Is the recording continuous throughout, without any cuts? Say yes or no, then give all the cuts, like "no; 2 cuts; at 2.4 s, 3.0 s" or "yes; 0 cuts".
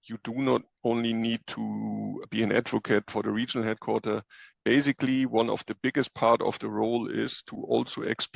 no; 2 cuts; at 2.2 s, 3.1 s